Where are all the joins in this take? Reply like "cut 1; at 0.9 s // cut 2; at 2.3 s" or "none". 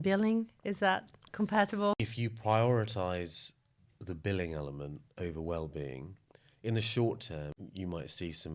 cut 1; at 1.9 s // cut 2; at 7.5 s